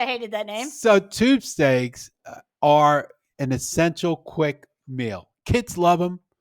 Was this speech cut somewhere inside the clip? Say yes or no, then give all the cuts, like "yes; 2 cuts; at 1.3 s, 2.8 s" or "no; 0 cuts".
no; 0 cuts